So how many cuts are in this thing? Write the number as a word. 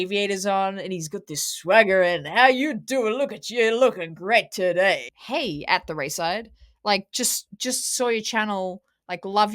one